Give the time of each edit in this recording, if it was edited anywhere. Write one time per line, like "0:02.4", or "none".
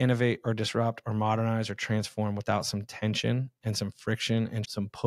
none